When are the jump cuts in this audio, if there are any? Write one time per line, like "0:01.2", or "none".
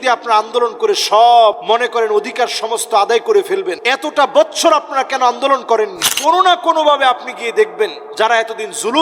0:01.6
0:03.8
0:06.0
0:08.0